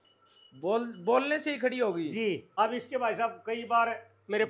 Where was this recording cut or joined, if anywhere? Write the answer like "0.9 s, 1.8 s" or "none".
2.5 s